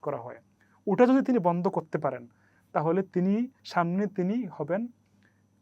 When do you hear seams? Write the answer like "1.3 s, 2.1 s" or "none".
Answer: 3.6 s